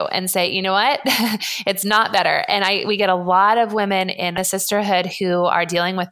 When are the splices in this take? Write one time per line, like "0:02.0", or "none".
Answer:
0:04.4